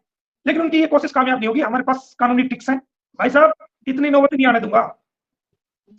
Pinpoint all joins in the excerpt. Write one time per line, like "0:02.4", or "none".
0:03.0